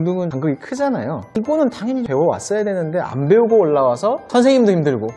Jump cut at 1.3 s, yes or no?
yes